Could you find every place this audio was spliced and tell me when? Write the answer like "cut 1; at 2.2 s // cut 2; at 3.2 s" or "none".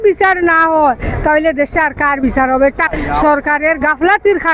cut 1; at 2.9 s